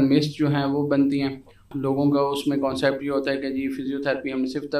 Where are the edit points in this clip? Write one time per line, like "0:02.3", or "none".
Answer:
0:01.7